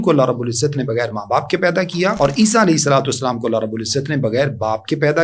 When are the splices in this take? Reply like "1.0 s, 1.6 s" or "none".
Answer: 2.1 s